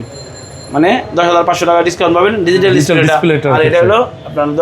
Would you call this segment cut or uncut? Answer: uncut